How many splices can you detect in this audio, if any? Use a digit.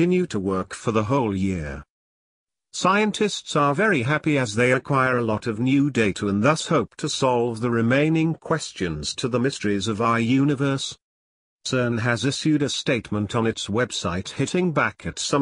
1